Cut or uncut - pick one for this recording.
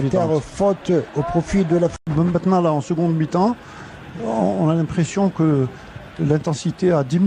uncut